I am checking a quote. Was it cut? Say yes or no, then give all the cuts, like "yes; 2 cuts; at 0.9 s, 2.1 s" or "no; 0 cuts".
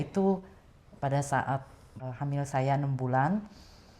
yes; 1 cut; at 2.0 s